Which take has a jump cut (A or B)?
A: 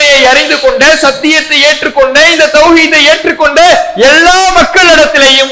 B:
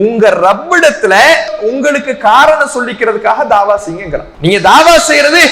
B